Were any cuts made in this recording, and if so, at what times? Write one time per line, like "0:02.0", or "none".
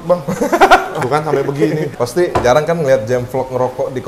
0:00.9
0:01.9